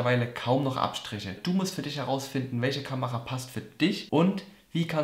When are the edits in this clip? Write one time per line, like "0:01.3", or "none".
0:01.4
0:04.0